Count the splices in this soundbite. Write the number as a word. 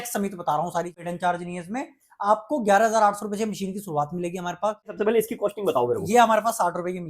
two